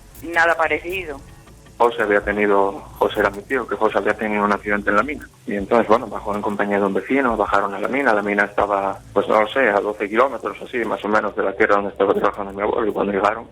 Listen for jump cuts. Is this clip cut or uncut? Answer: cut